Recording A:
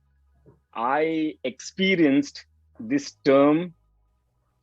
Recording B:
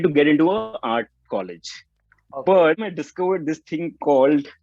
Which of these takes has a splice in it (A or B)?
B